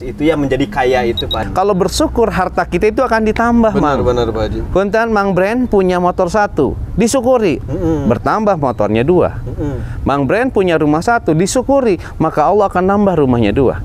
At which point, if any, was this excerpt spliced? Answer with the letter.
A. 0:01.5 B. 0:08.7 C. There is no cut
A